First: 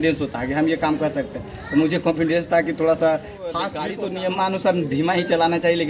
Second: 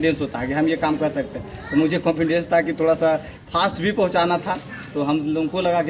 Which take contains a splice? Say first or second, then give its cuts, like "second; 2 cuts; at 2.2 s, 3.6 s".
first; 1 cut; at 3.7 s